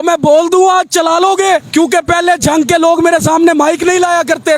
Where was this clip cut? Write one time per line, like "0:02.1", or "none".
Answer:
0:01.7

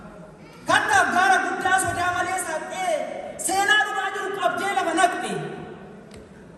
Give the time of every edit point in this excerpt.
none

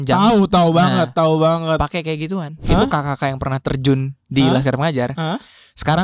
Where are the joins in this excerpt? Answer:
0:02.6

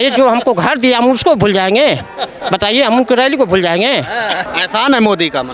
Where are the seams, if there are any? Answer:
0:04.4

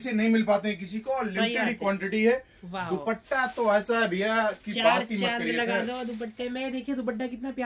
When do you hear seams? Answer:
none

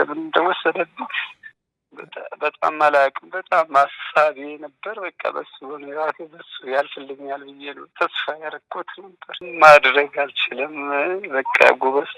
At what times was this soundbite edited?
0:09.5

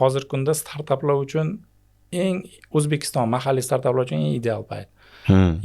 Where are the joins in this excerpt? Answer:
none

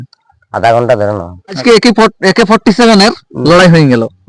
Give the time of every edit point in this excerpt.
0:01.6

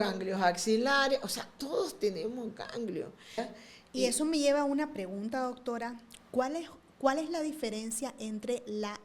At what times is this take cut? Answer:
0:03.4

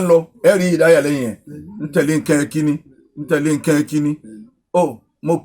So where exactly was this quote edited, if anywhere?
none

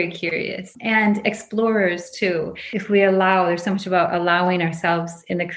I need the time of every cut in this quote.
0:02.8

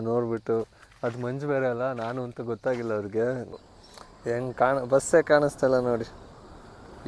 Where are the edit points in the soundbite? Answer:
0:03.6

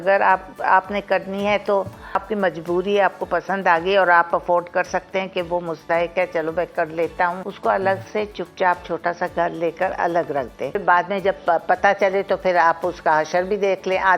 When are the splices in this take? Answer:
0:02.2
0:07.5
0:10.8

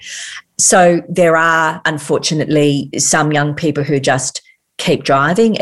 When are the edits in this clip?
0:01.9
0:02.9

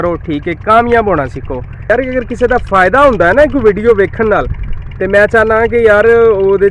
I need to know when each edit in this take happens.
0:01.9

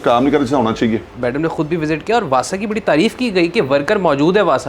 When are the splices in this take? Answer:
0:01.2

